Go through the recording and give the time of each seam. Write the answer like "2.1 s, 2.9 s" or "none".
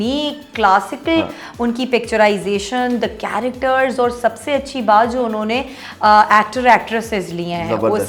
none